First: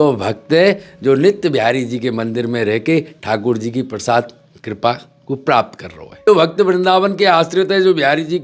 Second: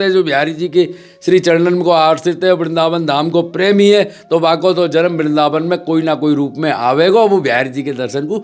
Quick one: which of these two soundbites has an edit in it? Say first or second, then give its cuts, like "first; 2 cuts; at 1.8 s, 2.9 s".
first; 1 cut; at 6.2 s